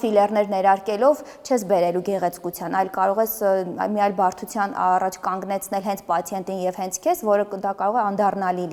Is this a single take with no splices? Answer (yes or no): yes